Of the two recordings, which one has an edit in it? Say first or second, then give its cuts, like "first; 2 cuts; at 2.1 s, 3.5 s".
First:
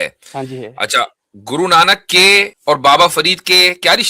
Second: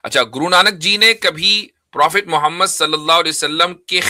first; 1 cut; at 2.5 s